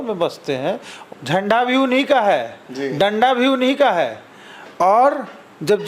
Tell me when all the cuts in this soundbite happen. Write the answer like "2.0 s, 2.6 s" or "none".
0.9 s